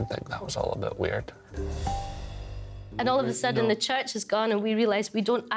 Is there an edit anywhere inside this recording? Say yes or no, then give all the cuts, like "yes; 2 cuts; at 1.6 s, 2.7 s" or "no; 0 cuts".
yes; 2 cuts; at 1.5 s, 2.8 s